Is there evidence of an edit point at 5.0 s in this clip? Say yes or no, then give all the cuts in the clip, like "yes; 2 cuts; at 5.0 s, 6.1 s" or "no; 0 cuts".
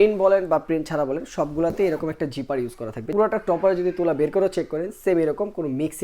no; 1 cut; at 3.0 s